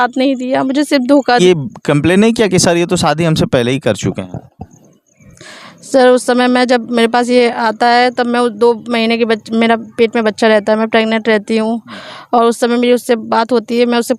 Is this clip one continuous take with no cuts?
no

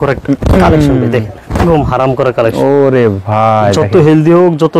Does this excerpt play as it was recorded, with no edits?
yes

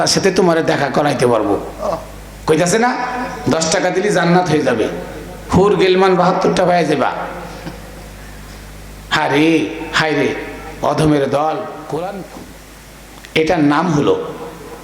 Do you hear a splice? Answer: yes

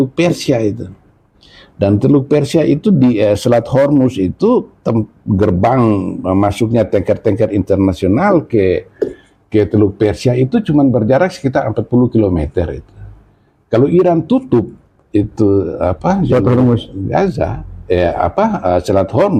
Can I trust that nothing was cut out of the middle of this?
yes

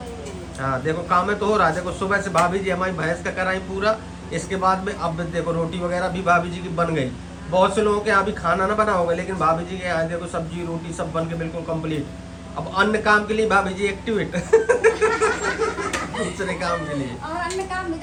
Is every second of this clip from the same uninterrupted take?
yes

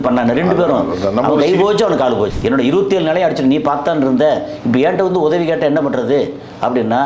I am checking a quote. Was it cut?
yes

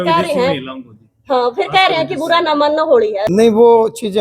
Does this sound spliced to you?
yes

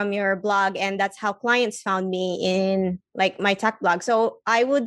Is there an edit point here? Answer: no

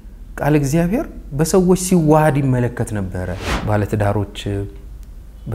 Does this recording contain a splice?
yes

